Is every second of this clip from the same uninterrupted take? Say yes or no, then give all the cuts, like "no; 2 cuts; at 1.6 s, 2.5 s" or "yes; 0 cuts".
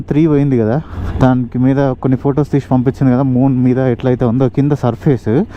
no; 1 cut; at 0.9 s